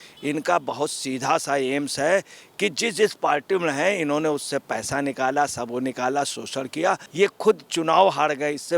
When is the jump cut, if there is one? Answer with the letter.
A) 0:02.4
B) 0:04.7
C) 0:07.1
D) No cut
C